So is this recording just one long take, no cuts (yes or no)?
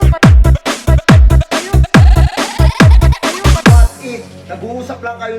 no